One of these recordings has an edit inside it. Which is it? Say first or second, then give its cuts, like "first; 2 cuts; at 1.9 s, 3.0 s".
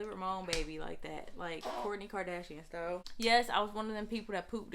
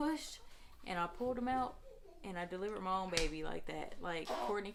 first; 1 cut; at 3.1 s